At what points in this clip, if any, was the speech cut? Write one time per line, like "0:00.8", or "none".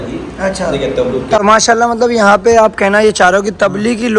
0:01.4